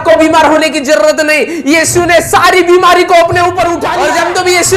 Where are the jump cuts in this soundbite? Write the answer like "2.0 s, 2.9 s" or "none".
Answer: 3.8 s